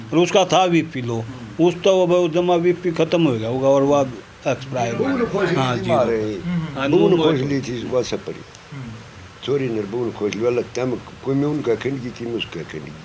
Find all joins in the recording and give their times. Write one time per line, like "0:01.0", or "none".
none